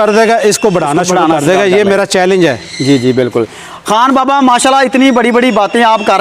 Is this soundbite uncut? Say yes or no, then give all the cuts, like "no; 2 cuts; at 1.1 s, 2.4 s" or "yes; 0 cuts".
yes; 0 cuts